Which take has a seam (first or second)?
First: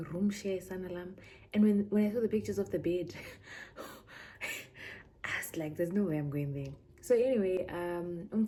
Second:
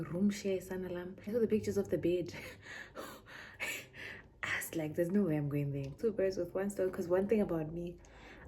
second